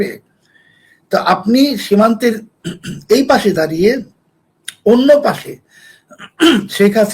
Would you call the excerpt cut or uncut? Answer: uncut